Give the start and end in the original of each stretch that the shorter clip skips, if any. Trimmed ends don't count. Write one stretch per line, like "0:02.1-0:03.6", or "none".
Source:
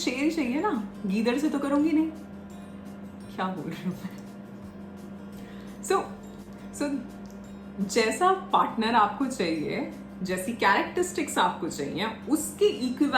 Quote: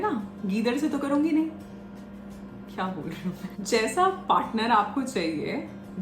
0:04.3-0:07.9